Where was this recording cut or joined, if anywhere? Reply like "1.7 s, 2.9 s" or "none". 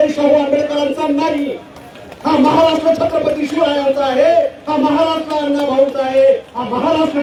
none